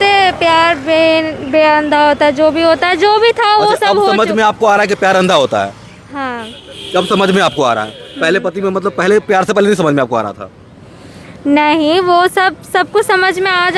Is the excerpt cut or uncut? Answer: uncut